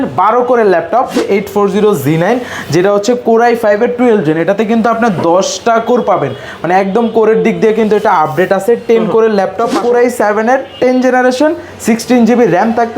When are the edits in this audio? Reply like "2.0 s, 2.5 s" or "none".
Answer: 1.2 s, 9.8 s